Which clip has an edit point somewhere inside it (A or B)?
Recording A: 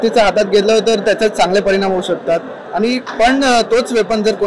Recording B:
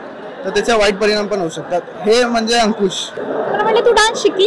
B